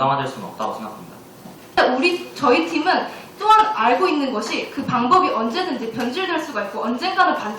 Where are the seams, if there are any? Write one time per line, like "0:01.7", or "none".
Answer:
0:01.7